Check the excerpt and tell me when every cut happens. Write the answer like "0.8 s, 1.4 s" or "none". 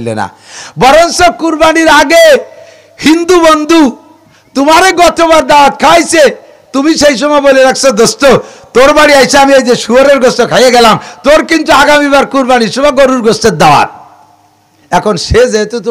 none